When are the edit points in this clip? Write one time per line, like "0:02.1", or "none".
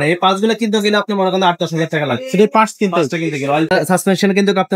0:03.7